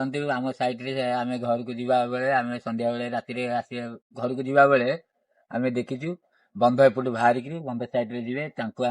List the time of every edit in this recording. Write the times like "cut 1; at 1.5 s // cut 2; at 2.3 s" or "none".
none